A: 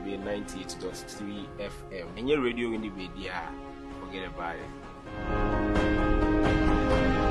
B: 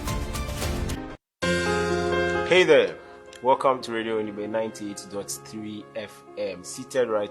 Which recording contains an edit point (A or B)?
B